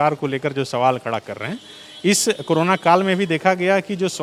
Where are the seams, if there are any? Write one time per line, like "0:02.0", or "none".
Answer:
none